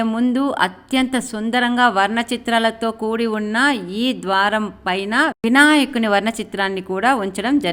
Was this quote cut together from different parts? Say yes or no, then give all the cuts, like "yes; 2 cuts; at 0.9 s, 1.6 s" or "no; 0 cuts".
no; 0 cuts